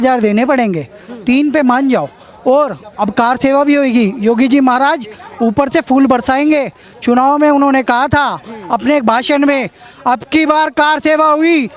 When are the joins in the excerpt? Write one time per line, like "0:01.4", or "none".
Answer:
none